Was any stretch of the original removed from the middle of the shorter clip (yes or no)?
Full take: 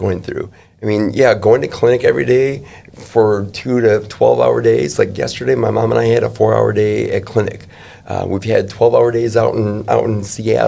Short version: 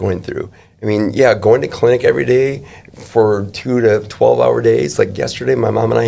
no